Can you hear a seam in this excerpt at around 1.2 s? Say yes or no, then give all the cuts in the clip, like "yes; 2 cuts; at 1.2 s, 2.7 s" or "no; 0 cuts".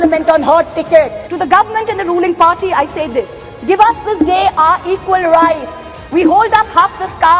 yes; 1 cut; at 1.2 s